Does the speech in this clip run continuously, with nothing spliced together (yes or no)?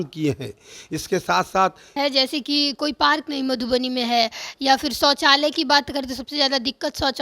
no